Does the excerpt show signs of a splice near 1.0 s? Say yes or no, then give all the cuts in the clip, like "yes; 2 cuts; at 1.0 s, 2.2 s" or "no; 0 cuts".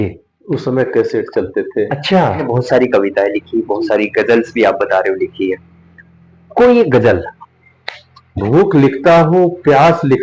no; 2 cuts; at 2.4 s, 7.3 s